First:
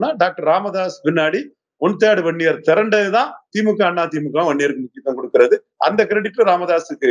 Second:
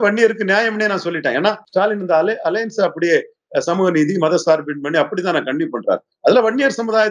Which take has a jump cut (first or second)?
second